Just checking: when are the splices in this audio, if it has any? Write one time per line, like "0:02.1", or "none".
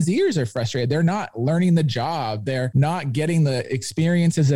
0:02.7